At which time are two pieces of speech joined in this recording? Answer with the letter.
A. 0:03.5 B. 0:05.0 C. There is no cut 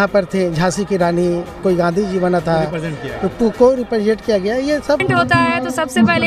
B